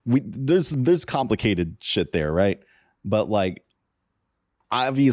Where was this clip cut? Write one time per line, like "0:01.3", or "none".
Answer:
none